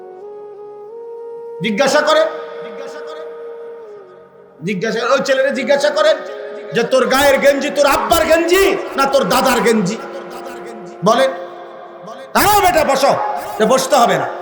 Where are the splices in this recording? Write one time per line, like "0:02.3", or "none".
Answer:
0:01.6